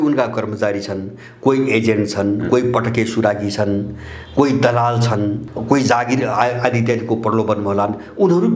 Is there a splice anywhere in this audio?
yes; 1 cut; at 5.5 s

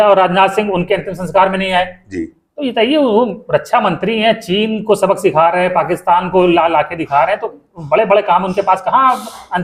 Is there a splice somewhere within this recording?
no; 0 cuts

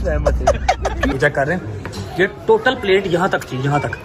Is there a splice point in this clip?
yes; 1 cut; at 1.1 s

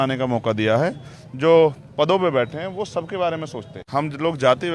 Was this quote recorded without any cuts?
no; 1 cut; at 3.8 s

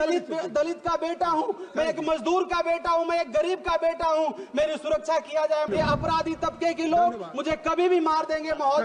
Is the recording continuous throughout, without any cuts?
no; 1 cut; at 5.7 s

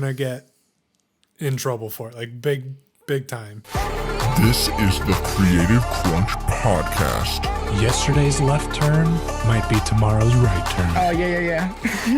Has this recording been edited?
yes; 1 cut; at 3.5 s

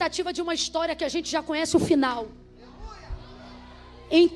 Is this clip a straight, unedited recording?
yes; 0 cuts

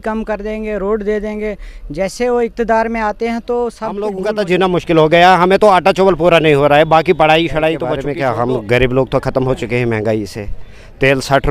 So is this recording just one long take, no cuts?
no; 2 cuts; at 4.2 s, 8.0 s

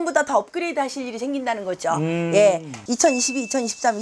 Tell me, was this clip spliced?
yes; 1 cut; at 2.8 s

